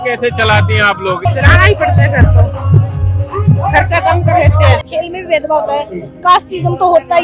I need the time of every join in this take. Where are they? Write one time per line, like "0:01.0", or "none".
0:01.2
0:04.8